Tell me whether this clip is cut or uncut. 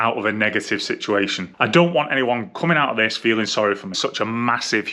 cut